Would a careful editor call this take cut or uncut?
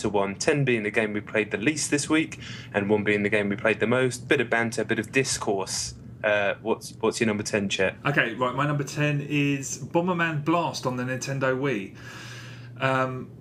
uncut